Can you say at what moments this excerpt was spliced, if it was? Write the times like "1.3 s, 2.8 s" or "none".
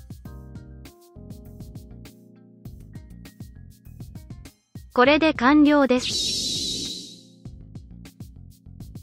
none